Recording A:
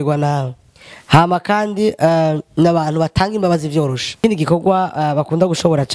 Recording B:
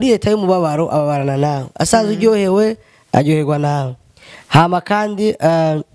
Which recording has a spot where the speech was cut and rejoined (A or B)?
A